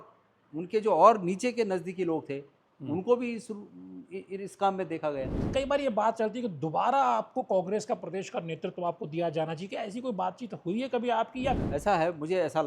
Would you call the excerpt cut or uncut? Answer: cut